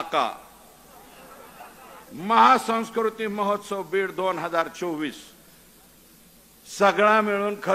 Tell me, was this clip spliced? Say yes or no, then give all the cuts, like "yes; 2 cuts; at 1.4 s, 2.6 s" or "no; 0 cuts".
no; 0 cuts